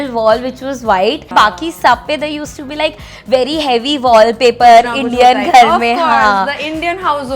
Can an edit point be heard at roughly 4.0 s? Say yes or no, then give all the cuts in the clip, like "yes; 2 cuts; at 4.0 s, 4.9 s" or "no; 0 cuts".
no; 1 cut; at 1.3 s